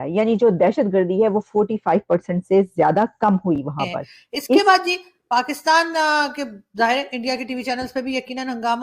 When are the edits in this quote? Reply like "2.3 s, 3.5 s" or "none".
4.6 s